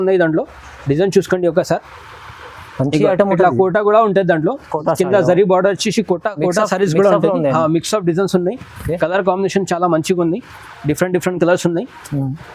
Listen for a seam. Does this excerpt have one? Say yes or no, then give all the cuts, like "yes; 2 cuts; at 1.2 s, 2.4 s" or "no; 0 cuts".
no; 0 cuts